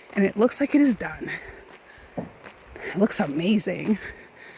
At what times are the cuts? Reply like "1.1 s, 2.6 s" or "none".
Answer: none

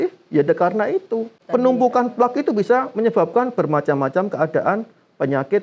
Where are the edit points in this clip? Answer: 1.4 s

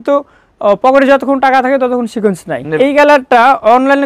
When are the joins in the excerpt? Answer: 2.6 s

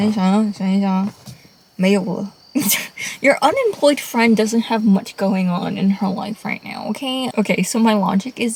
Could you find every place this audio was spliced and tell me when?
none

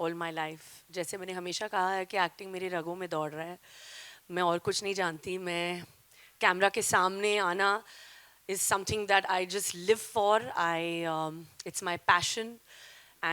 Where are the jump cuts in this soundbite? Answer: none

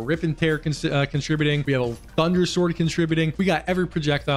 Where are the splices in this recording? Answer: 1.6 s, 3.3 s

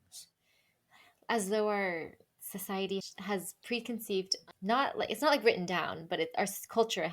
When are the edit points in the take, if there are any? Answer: 3.1 s

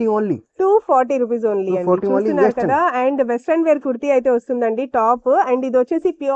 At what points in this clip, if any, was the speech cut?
none

